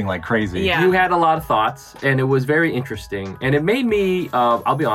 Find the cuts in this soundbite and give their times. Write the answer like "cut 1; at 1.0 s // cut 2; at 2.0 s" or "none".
none